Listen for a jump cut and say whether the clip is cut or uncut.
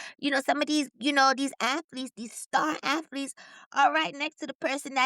uncut